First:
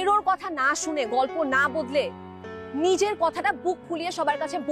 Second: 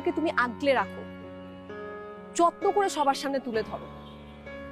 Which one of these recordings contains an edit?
second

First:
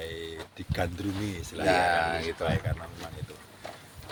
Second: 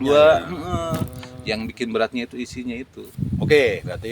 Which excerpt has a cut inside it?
second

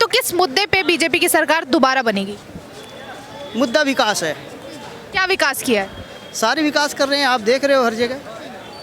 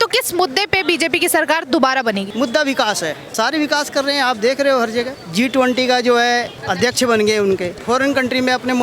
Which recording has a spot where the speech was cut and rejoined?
second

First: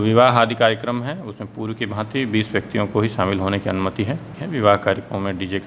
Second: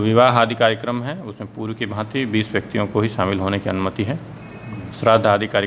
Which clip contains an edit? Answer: first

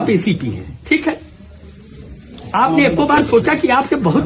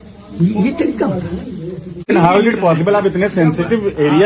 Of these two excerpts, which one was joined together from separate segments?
second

